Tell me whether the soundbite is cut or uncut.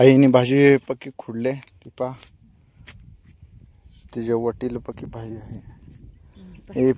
uncut